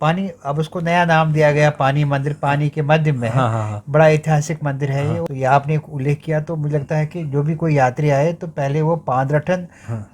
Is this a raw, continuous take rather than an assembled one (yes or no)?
no